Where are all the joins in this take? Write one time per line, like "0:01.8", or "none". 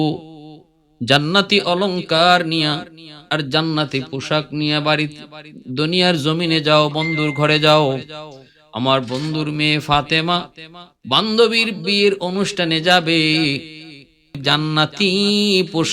0:14.4